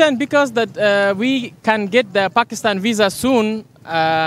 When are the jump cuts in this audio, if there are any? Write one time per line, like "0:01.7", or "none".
none